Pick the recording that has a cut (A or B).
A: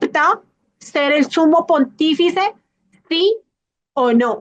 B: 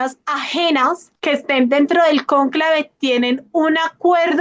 B